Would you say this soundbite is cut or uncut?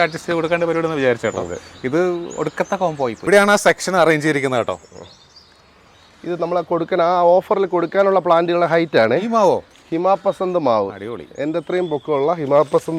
cut